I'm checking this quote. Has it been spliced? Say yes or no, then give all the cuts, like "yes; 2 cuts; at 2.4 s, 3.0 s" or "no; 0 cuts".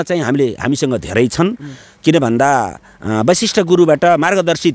no; 0 cuts